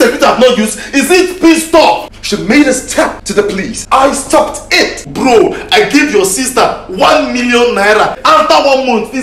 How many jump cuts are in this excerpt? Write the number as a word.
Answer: four